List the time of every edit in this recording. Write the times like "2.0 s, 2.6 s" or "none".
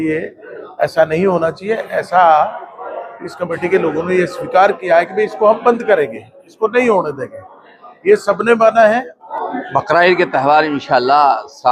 9.2 s